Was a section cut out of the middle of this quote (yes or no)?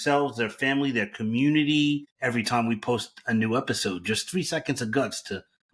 yes